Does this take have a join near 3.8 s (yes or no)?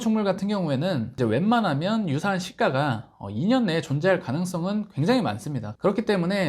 no